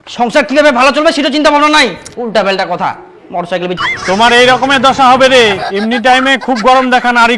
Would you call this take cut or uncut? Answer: cut